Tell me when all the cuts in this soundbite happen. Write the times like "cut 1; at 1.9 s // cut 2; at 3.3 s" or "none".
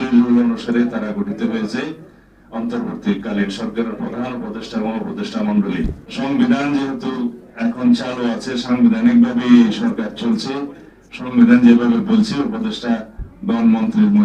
cut 1; at 6.0 s